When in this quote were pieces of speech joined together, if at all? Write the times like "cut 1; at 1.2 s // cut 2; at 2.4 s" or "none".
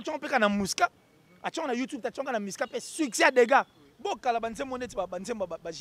cut 1; at 3.8 s